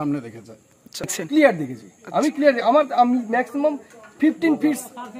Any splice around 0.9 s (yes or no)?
yes